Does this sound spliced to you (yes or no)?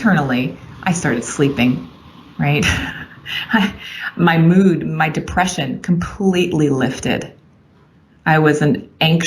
no